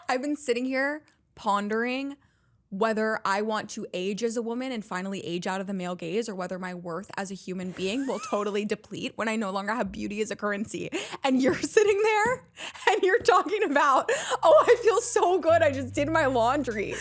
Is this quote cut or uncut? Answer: uncut